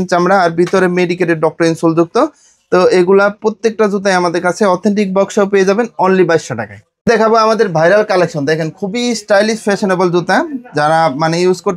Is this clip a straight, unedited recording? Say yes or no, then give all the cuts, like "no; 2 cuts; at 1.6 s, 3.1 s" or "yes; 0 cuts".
yes; 0 cuts